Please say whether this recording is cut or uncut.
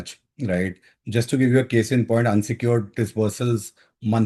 uncut